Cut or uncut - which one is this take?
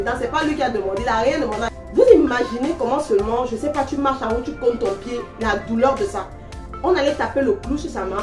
cut